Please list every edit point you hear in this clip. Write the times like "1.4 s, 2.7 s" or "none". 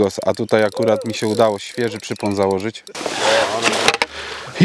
3.0 s